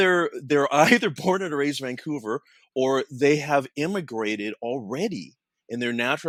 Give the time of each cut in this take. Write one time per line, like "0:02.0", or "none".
none